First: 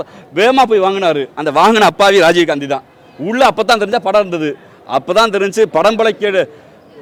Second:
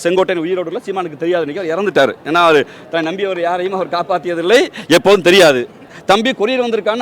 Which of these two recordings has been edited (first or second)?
second